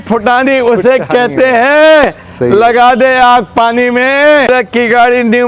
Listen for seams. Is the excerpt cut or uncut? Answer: cut